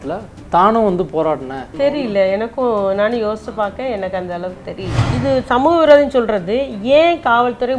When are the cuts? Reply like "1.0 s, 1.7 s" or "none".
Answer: 1.7 s, 5.0 s